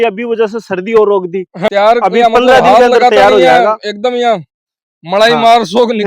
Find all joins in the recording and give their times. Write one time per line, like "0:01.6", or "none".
0:01.7

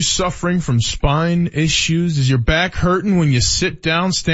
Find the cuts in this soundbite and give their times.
none

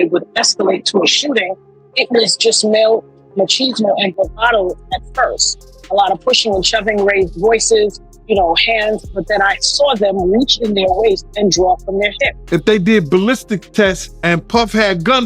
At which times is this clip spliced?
0:12.3
0:14.1

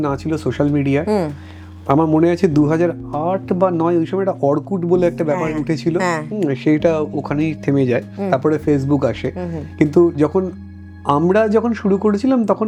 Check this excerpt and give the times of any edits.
none

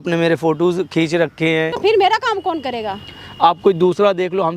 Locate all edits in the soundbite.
0:01.7

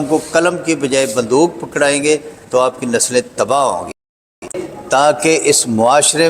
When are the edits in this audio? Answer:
0:04.5

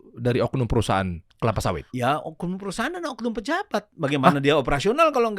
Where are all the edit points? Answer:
0:01.9

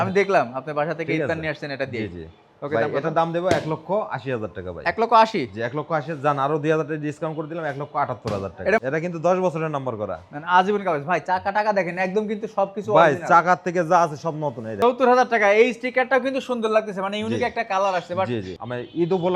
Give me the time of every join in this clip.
0:08.8
0:14.7
0:18.5

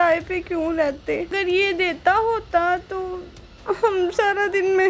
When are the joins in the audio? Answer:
0:01.3

